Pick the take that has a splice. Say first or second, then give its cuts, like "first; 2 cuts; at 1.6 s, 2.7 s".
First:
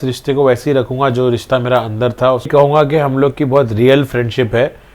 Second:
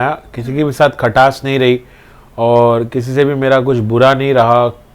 first; 1 cut; at 2.5 s